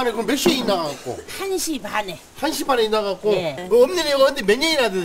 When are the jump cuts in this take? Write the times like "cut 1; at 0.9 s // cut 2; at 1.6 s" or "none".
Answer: cut 1; at 3.6 s